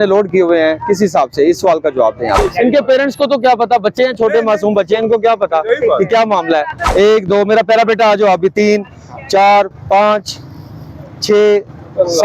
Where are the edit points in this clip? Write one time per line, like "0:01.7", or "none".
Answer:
0:02.5
0:06.8